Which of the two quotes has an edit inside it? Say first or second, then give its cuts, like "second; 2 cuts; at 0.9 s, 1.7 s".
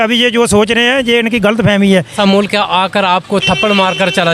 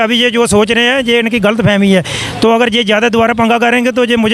first; 1 cut; at 2.1 s